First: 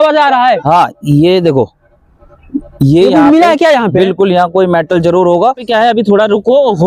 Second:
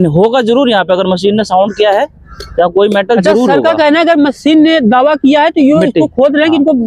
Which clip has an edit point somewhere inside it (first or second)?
first